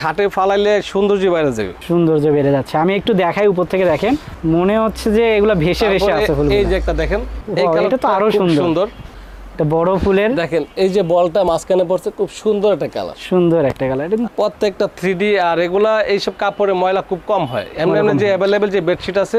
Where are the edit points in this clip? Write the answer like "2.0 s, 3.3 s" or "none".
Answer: none